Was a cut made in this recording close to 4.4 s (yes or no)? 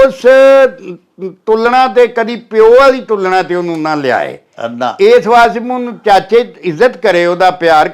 no